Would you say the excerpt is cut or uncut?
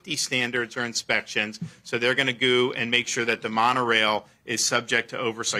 uncut